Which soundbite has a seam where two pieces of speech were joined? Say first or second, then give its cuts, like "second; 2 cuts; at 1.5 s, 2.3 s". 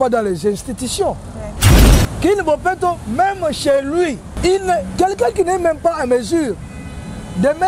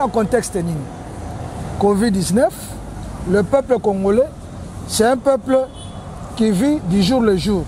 first; 2 cuts; at 1.6 s, 4.3 s